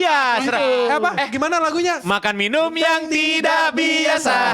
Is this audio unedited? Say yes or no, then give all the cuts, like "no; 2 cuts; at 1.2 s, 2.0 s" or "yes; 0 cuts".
yes; 0 cuts